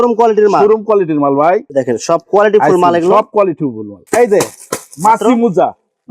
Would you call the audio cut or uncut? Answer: cut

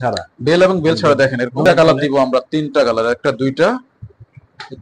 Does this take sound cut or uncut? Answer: cut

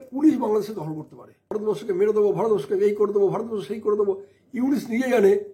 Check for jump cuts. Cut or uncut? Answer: cut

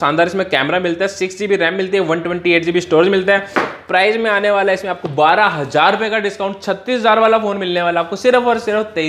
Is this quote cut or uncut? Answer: uncut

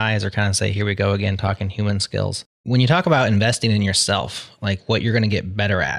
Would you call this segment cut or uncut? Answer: cut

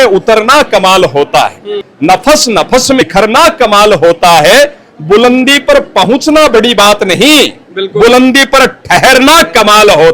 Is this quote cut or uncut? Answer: cut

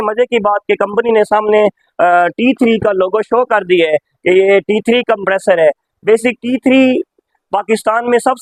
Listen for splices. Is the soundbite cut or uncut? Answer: uncut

